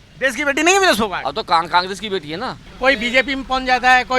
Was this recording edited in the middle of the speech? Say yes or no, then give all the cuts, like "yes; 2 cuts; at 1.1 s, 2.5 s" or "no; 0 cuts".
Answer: yes; 1 cut; at 2.7 s